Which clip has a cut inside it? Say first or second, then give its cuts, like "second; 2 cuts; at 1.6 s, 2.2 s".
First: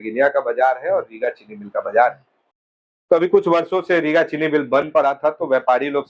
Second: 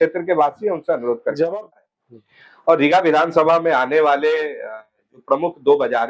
second; 1 cut; at 1.5 s